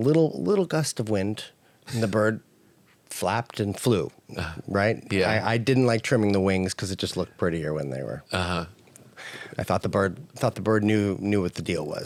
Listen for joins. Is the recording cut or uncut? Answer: uncut